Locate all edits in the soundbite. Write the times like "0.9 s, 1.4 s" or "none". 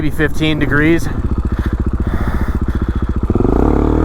1.2 s

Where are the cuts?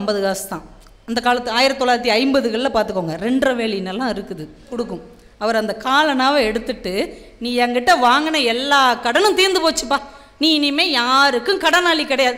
4.7 s

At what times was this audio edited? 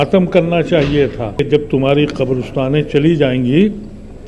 1.4 s

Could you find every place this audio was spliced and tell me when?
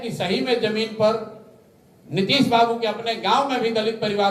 none

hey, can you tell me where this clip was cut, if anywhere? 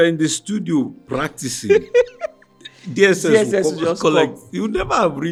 none

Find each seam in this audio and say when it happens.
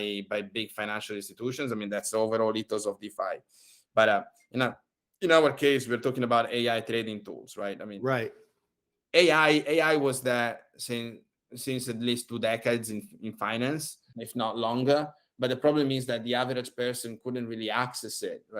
14.0 s

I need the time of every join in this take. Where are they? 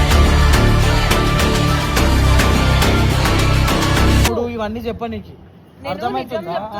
none

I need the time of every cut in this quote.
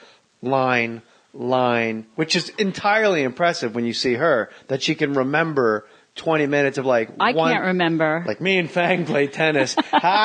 none

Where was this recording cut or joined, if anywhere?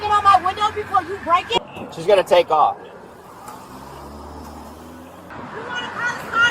1.6 s, 5.3 s

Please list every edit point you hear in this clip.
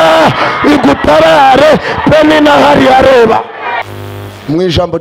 3.8 s

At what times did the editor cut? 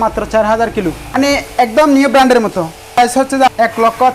1.2 s, 3.2 s

